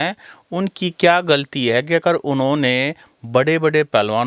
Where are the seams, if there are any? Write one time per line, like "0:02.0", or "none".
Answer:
none